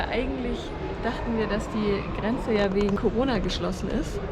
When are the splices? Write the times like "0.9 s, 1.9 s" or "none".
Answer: 3.0 s